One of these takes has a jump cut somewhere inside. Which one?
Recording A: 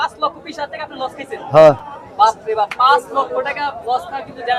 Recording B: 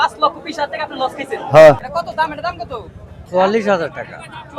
B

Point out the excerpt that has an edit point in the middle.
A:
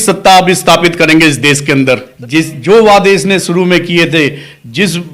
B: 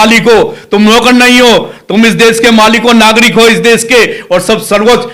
A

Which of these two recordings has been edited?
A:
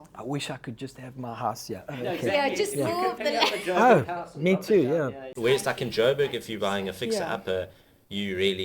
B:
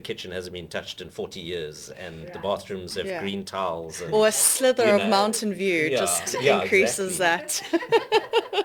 A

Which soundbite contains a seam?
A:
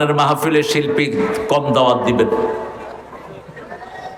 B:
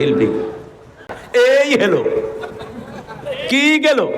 B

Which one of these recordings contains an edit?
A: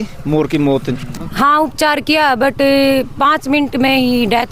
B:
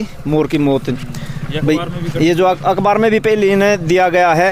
A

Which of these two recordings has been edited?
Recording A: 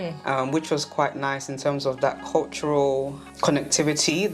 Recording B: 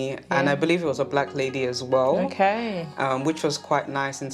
A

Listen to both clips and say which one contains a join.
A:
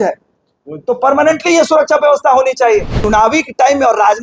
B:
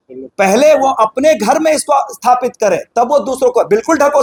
A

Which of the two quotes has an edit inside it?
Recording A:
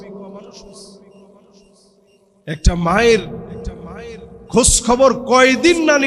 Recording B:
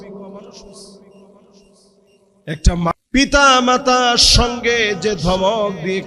B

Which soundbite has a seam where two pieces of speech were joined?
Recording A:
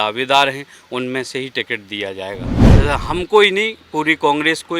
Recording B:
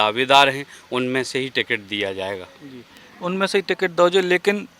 A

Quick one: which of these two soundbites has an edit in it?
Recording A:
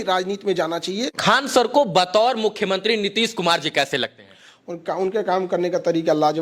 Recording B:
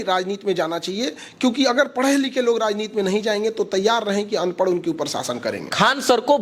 A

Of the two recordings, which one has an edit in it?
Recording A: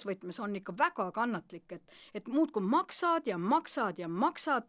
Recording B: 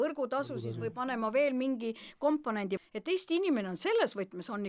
B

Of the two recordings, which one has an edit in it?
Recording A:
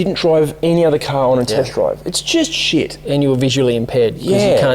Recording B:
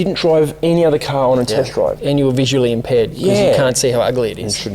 B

